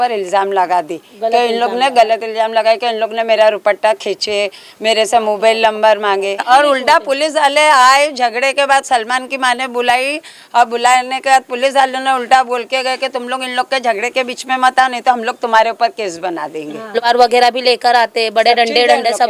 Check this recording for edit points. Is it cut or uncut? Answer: cut